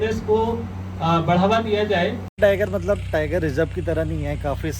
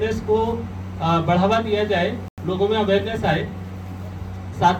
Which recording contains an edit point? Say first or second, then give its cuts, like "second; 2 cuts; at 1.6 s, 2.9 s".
first; 1 cut; at 2.3 s